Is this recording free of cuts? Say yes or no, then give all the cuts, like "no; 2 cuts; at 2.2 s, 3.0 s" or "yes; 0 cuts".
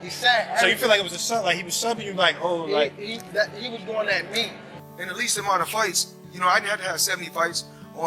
no; 1 cut; at 4.7 s